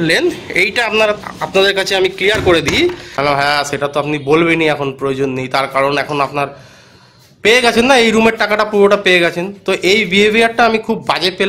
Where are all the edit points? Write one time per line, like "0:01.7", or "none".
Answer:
0:03.1